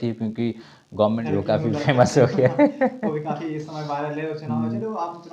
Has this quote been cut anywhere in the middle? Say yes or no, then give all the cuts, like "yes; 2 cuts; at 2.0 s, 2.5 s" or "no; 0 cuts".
yes; 1 cut; at 1.2 s